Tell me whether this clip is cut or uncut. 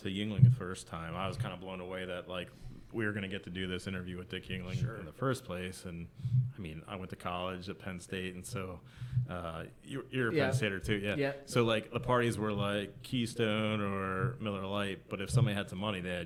uncut